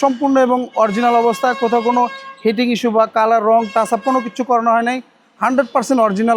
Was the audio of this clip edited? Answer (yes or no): no